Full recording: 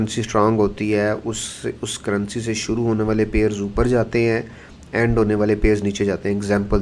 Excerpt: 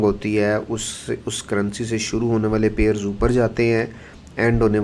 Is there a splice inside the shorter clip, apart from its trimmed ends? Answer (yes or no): no